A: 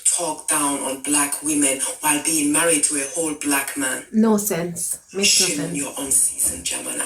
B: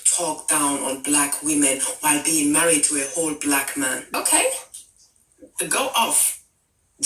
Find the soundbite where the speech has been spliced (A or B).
B